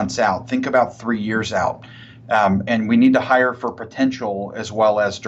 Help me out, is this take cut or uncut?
uncut